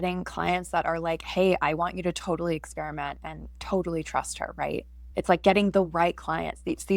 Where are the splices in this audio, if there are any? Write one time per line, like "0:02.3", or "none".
0:05.0